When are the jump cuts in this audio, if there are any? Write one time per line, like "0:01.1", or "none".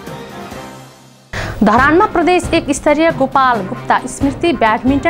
0:01.1

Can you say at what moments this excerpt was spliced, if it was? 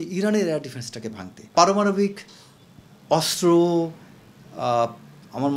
0:01.5

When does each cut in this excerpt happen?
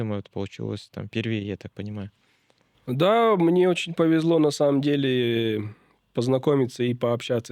none

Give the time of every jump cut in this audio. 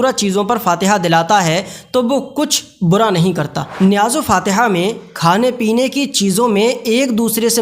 0:03.6

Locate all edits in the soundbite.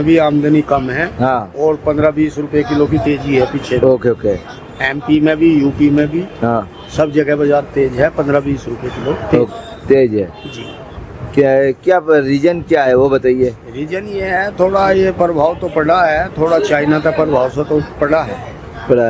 none

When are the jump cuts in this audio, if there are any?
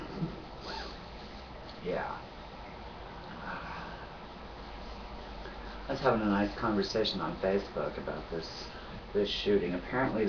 0:01.0

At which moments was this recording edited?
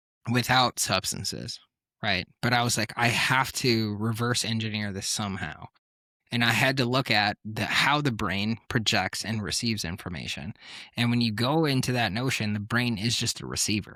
none

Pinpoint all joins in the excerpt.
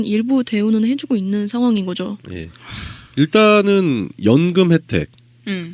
0:01.0

